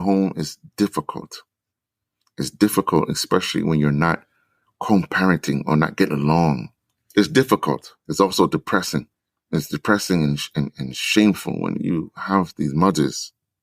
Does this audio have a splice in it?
no; 0 cuts

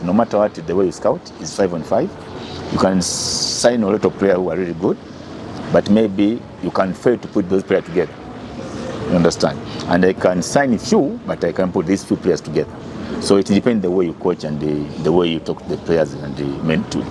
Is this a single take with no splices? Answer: yes; 0 cuts

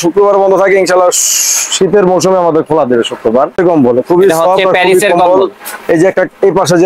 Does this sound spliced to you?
yes; 1 cut; at 3.6 s

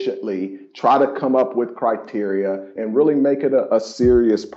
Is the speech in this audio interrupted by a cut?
yes; 2 cuts; at 2.7 s, 3.7 s

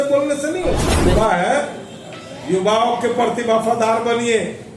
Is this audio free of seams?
no; 1 cut; at 0.9 s

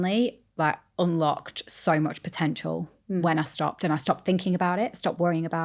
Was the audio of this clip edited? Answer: no; 0 cuts

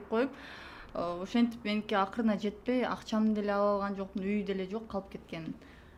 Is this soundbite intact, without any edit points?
yes; 0 cuts

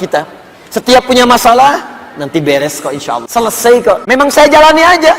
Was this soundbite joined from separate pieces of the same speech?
yes; 2 cuts; at 3.2 s, 4.0 s

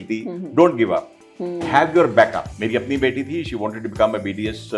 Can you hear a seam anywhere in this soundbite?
yes; 1 cut; at 2.5 s

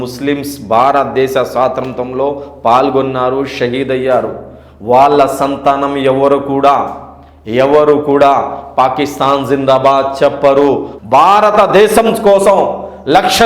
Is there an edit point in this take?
yes; 1 cut; at 10.9 s

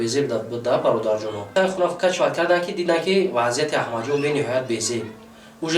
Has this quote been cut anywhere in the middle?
yes; 1 cut; at 1.5 s

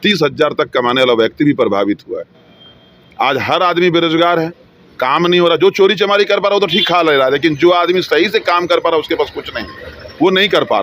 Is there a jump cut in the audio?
no; 0 cuts

